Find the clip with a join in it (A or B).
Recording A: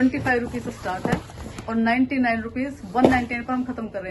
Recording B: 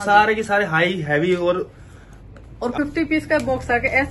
B